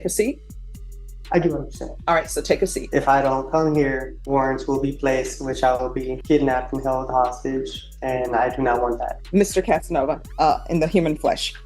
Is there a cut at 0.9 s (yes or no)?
no